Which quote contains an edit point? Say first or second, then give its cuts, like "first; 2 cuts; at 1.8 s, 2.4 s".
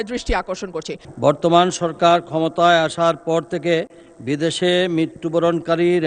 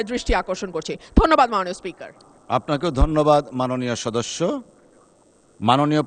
first; 1 cut; at 0.9 s